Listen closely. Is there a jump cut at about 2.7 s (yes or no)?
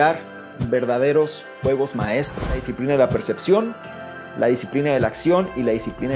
yes